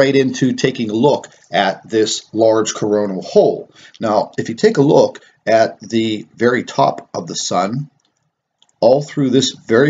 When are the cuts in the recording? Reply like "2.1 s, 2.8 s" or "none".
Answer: 2.0 s